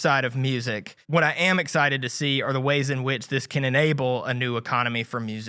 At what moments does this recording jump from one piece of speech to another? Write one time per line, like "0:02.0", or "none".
0:00.9